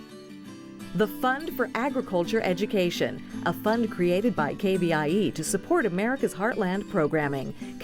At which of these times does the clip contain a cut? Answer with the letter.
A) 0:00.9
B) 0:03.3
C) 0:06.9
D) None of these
A